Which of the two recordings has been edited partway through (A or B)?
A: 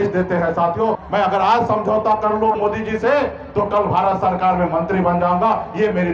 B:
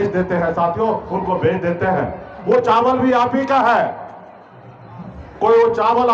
A